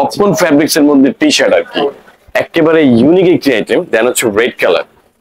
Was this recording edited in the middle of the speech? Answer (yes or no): no